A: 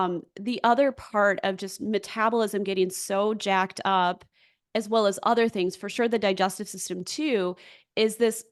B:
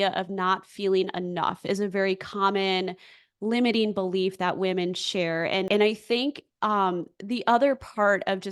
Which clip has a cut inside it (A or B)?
B